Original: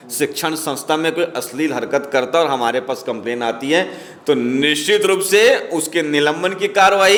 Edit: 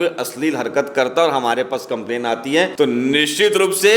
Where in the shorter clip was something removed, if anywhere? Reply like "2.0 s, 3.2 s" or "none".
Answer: 2.7 s